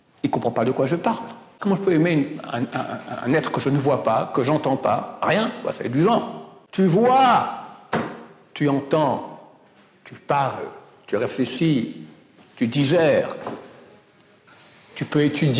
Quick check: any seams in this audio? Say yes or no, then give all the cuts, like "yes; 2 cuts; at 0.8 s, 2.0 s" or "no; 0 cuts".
yes; 2 cuts; at 1.6 s, 6.6 s